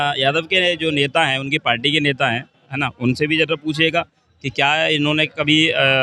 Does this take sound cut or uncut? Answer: uncut